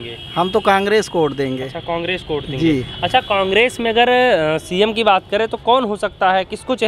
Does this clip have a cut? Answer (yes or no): no